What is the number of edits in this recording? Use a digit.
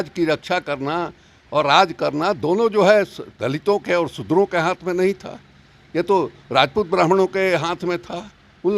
0